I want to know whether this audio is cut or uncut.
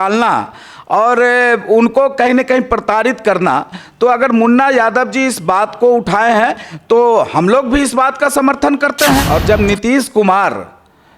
cut